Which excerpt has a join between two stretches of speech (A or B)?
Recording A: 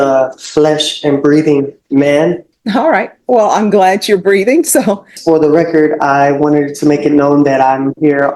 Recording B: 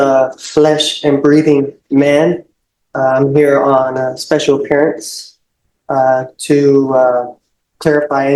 A